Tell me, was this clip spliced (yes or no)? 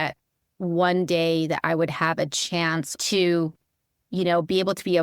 yes